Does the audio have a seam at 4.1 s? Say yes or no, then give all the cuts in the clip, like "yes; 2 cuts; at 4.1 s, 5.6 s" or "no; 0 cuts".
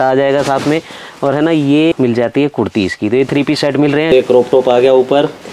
yes; 2 cuts; at 1.9 s, 4.1 s